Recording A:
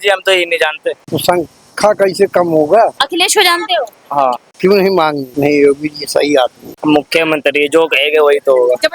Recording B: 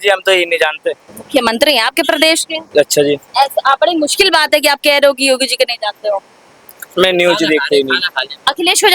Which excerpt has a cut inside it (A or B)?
A